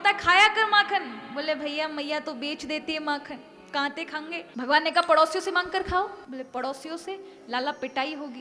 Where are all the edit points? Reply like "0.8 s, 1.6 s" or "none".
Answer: 4.4 s, 6.2 s